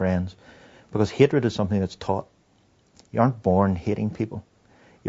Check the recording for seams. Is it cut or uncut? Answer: uncut